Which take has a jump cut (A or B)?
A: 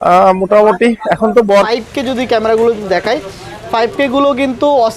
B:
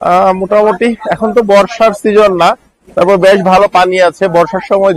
A